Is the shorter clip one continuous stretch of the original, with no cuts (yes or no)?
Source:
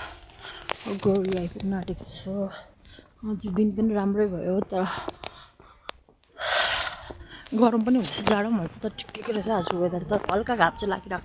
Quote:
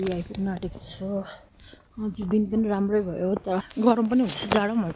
no